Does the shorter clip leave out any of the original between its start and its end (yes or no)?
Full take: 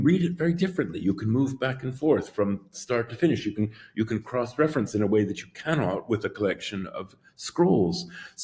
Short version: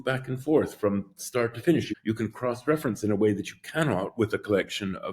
yes